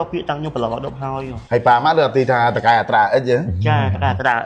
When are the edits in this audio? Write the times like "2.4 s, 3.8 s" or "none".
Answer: 1.3 s